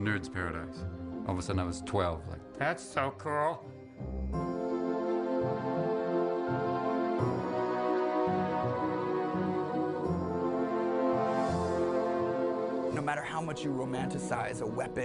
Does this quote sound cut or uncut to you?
uncut